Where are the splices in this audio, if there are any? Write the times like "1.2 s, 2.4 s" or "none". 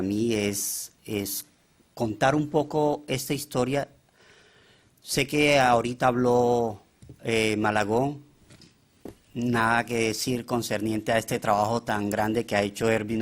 11.4 s

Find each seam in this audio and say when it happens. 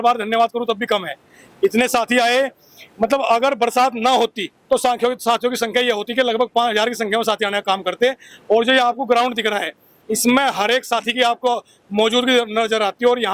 none

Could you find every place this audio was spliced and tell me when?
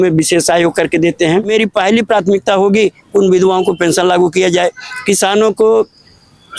1.5 s

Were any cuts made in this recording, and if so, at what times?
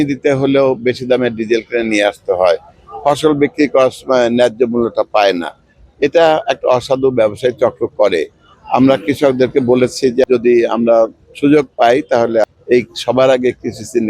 10.2 s, 12.4 s

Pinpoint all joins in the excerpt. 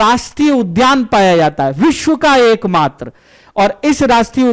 none

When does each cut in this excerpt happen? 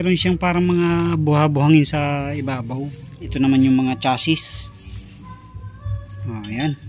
3.3 s

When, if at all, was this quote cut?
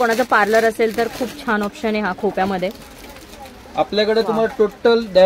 none

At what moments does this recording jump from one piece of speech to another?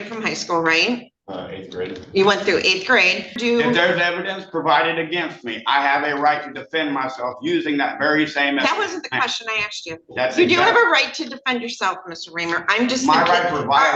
3.4 s

